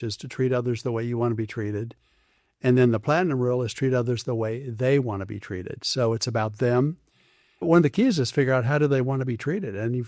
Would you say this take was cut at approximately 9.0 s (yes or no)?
no